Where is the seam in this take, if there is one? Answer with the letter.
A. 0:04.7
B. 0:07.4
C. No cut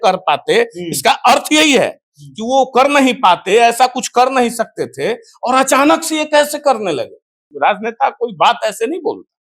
B